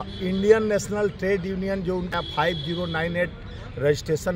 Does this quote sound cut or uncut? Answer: cut